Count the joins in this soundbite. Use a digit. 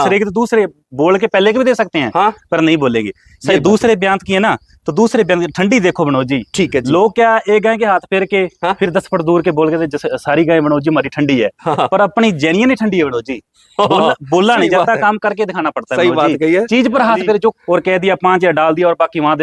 1